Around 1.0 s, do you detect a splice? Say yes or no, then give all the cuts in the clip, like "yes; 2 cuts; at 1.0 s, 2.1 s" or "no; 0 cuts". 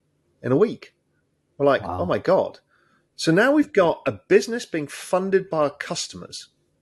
no; 0 cuts